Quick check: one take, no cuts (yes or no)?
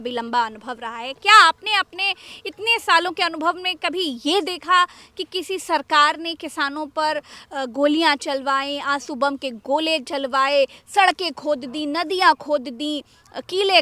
yes